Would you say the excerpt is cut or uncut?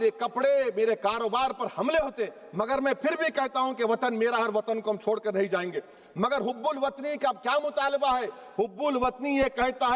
uncut